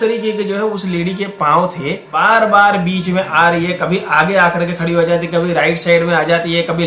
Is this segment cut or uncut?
cut